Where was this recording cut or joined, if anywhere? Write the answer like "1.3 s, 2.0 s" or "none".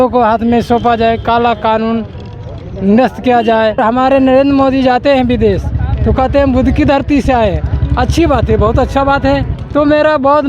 3.8 s, 9.6 s